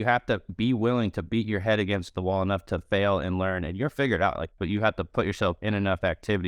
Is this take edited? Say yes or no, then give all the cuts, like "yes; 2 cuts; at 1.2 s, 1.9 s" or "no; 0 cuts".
yes; 1 cut; at 4.6 s